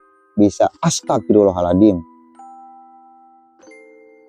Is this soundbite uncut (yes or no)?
no